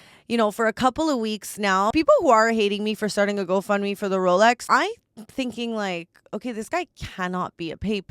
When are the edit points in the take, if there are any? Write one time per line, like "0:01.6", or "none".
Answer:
0:01.9
0:04.6